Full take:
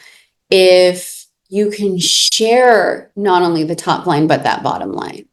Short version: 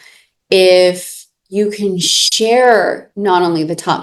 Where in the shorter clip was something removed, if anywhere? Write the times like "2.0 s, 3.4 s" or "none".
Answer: none